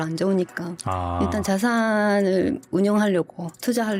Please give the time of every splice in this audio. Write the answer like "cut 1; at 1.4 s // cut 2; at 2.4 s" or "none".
none